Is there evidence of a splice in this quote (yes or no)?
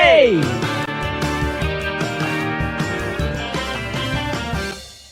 no